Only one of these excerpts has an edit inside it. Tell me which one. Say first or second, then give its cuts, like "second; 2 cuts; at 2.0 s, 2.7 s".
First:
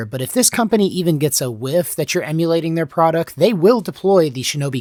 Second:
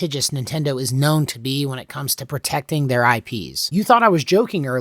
second; 1 cut; at 3.5 s